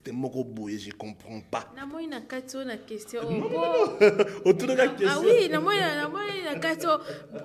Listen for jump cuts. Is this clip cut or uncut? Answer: uncut